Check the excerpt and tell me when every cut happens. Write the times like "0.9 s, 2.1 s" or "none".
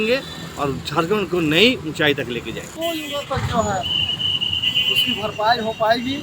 2.7 s